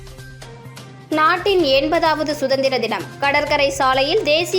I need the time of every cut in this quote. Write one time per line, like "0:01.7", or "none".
0:01.0